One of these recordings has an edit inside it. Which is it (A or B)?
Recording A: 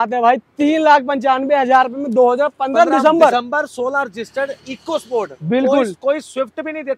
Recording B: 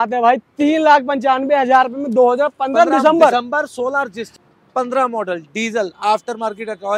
B